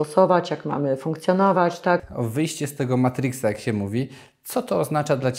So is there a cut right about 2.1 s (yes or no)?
yes